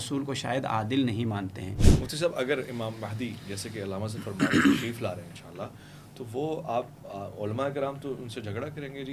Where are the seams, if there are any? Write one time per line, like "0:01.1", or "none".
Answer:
0:01.8